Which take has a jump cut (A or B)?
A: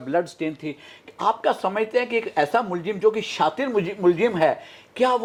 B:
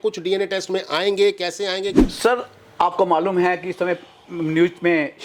B